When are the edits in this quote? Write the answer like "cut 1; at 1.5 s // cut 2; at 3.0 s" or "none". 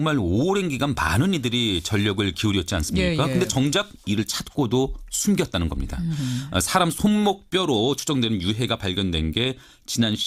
cut 1; at 8.7 s